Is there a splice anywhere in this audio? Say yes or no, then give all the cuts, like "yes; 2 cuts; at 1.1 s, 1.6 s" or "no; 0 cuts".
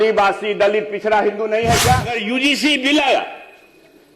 yes; 1 cut; at 2.2 s